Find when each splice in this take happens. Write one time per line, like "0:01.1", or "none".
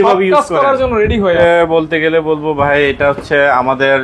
0:01.4